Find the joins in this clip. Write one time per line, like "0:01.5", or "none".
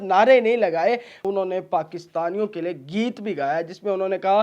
0:01.2